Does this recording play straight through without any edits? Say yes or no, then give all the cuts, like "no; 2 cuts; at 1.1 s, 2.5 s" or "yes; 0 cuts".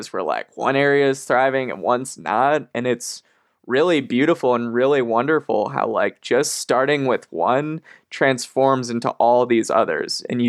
yes; 0 cuts